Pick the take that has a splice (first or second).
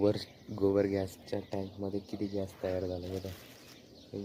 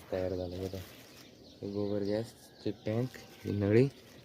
second